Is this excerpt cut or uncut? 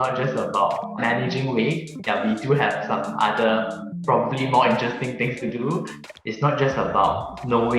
cut